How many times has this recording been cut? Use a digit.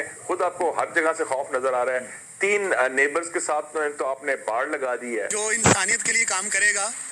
1